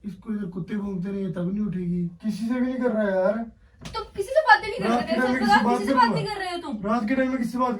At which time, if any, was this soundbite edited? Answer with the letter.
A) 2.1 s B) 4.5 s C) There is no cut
A